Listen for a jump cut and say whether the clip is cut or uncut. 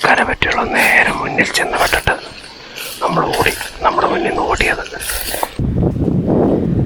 cut